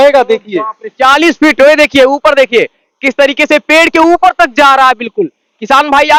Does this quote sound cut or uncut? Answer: uncut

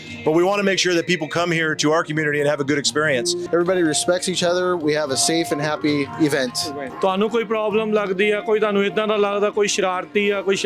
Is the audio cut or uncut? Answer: cut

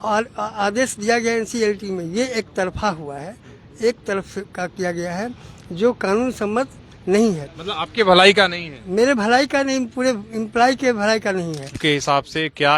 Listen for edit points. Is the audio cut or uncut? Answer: cut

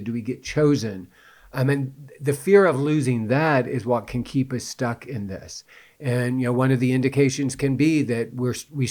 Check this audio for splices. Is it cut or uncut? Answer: uncut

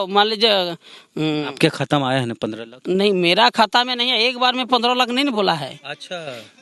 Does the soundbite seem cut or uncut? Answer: uncut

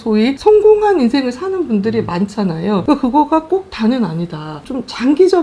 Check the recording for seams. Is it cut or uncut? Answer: uncut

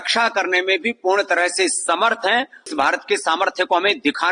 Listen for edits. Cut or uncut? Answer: cut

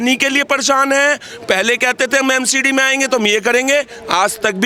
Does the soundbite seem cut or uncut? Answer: uncut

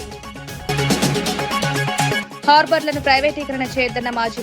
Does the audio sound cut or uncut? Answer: cut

